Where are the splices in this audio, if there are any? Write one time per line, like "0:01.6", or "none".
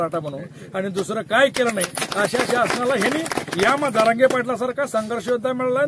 none